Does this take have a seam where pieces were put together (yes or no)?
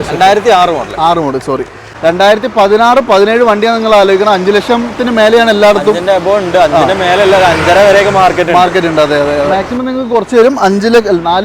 yes